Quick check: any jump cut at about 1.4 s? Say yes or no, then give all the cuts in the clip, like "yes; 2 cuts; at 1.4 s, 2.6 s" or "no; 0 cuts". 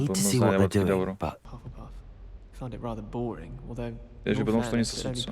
yes; 1 cut; at 1.4 s